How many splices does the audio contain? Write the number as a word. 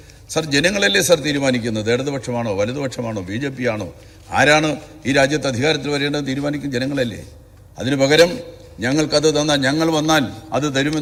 zero